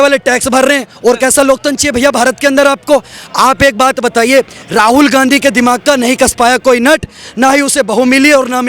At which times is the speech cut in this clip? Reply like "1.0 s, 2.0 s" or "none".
none